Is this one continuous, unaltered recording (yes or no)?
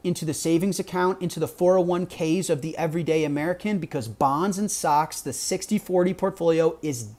yes